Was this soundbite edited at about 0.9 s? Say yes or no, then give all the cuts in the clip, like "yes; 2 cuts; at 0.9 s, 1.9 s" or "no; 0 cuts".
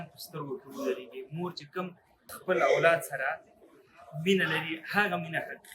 no; 1 cut; at 2.3 s